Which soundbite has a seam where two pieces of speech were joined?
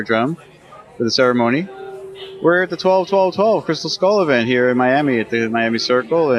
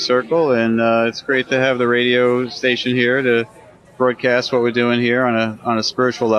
first; 1 cut; at 1.4 s

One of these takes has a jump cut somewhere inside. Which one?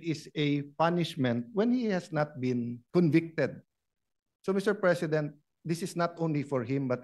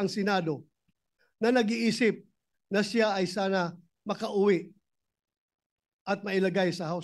first; 1 cut; at 2.8 s

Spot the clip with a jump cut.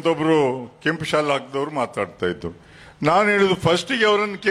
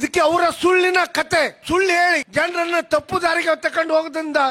second; 2 cuts; at 1.6 s, 2.2 s

